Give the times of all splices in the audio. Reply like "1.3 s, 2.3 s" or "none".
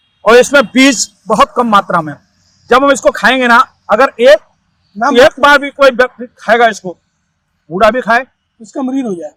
none